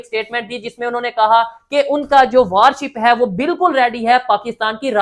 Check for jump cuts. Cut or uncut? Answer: uncut